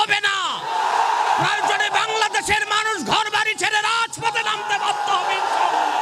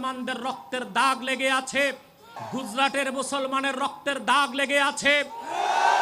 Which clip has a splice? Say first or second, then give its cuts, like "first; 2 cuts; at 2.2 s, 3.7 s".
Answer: second; 1 cut; at 2.4 s